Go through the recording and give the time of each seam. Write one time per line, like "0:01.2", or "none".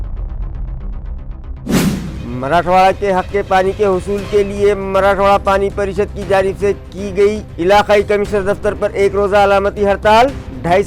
none